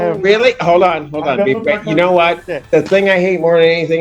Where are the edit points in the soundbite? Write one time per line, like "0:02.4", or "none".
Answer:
none